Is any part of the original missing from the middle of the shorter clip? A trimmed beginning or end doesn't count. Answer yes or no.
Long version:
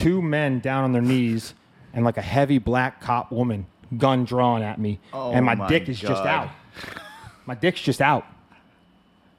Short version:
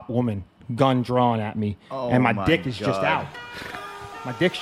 no